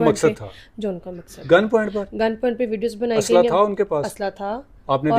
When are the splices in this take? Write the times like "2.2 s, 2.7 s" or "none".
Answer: none